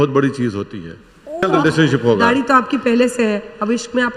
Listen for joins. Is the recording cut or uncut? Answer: cut